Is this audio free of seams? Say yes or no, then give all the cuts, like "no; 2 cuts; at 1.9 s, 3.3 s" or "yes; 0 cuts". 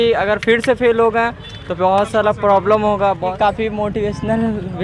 no; 1 cut; at 3.3 s